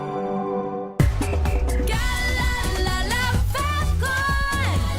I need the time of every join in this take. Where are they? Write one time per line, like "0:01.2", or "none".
0:01.1